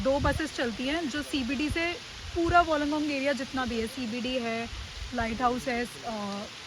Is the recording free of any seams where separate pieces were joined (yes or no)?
yes